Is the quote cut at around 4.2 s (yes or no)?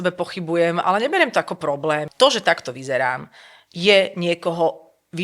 no